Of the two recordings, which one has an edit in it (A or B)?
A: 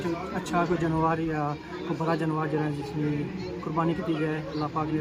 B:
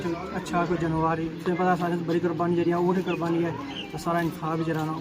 B